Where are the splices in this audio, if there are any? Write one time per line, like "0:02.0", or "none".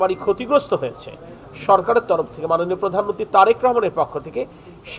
none